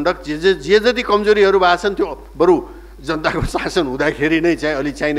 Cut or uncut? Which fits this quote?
uncut